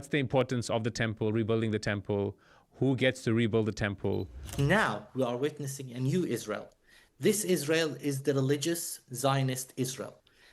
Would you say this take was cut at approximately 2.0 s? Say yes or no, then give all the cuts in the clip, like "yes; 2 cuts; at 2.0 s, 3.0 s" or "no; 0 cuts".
no; 1 cut; at 4.5 s